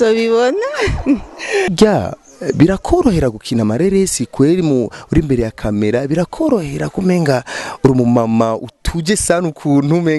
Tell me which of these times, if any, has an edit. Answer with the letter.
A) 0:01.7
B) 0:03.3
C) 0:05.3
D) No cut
A